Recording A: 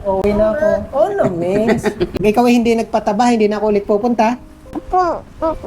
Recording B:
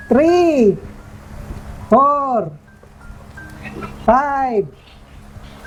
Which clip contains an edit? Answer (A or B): A